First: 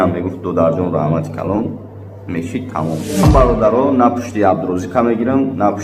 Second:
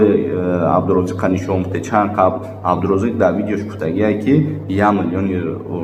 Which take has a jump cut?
first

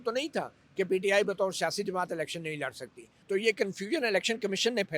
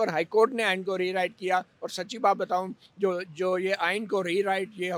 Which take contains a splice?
first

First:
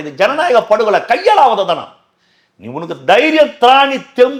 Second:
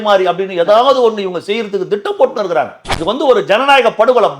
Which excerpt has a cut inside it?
second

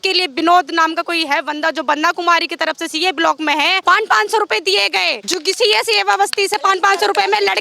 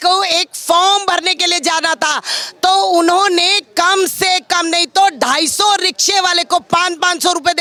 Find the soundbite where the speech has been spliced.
first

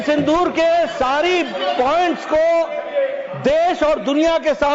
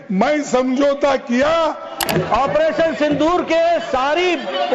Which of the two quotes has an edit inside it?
second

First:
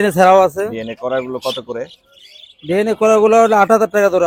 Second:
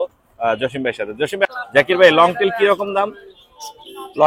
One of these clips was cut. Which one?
second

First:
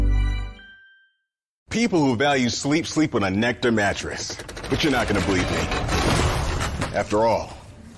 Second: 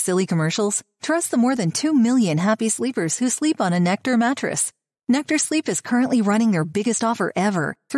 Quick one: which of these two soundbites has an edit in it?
first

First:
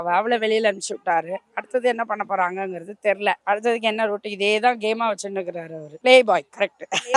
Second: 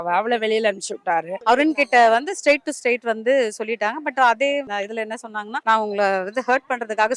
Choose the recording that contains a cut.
second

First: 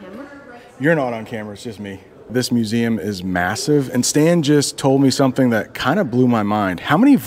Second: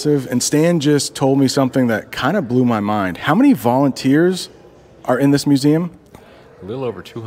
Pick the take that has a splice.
first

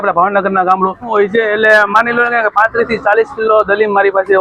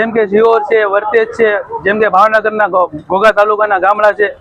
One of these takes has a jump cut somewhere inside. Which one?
first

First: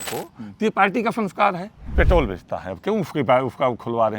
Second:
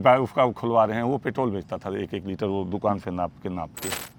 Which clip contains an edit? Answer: first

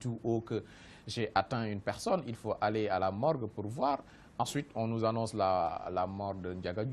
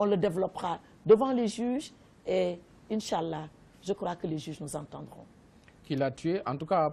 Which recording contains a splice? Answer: first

